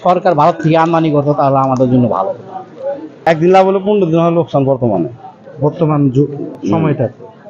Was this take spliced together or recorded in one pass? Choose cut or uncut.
cut